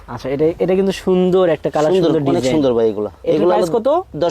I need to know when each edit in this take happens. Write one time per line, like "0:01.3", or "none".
none